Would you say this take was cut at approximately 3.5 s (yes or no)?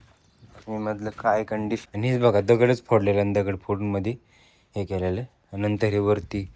no